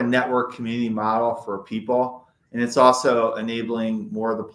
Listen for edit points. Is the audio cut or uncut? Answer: uncut